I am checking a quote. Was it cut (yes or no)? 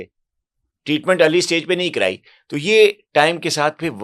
no